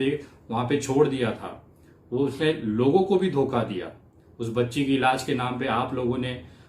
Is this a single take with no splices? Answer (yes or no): yes